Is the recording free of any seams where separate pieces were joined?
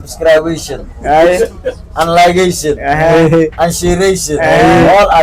yes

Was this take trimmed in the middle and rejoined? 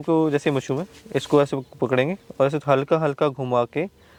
no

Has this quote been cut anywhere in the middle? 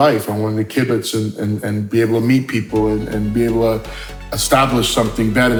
no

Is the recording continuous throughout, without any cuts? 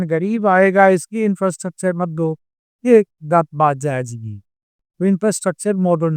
yes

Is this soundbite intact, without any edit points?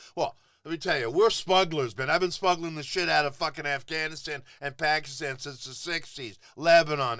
yes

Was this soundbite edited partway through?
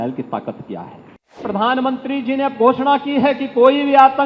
yes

